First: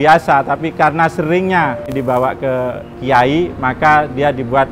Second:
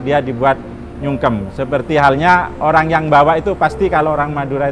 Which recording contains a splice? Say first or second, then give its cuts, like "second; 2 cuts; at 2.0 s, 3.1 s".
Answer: first; 1 cut; at 1.8 s